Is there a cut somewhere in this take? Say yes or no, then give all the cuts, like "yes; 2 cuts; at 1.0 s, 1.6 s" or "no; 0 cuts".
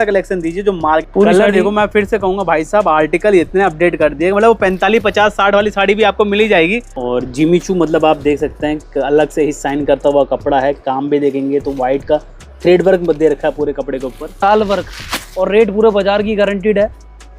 yes; 3 cuts; at 1.1 s, 6.9 s, 14.4 s